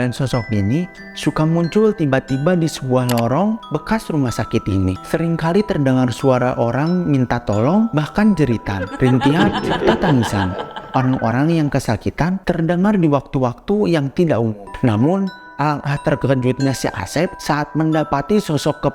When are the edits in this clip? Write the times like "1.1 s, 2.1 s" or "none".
5.0 s, 14.7 s